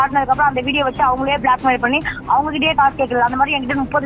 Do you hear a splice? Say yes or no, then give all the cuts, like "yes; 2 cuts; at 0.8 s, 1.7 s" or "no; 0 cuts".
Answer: no; 0 cuts